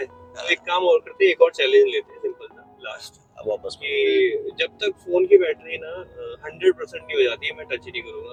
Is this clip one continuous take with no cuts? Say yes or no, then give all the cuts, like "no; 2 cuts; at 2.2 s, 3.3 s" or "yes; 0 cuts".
yes; 0 cuts